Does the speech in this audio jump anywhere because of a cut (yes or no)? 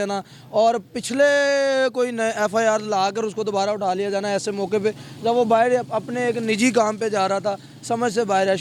no